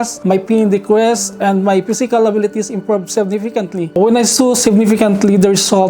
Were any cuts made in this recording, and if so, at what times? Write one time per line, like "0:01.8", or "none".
0:03.9